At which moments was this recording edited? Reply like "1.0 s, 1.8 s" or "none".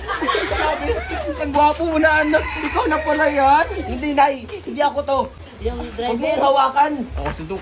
5.4 s